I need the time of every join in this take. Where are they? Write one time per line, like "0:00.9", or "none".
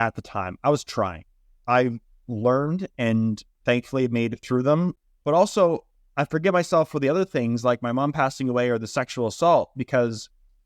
0:01.5
0:05.0